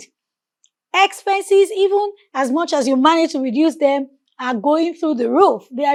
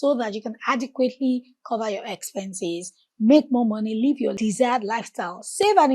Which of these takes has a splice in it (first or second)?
second